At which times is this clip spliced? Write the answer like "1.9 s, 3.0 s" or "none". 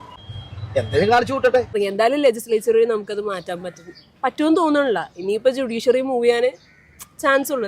1.7 s